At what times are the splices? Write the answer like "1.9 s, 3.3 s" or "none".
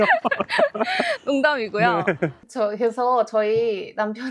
2.4 s